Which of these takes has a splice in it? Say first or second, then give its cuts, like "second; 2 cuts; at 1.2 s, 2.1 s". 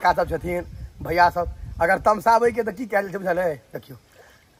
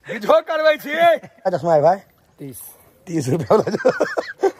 second; 1 cut; at 1.3 s